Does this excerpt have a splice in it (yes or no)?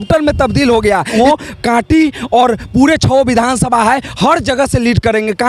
yes